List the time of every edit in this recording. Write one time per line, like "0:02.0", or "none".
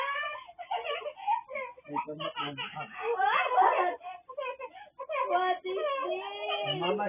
0:03.6